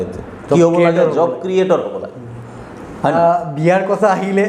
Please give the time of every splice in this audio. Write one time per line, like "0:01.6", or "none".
0:03.1